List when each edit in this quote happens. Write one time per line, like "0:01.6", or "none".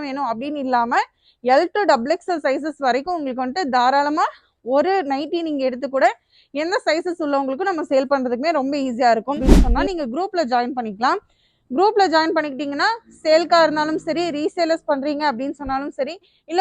0:09.4